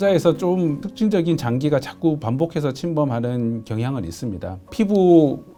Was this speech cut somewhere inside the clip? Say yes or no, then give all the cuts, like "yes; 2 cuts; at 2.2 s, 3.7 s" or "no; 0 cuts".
no; 0 cuts